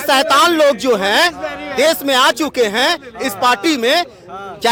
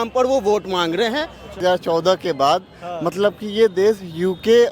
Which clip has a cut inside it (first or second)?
second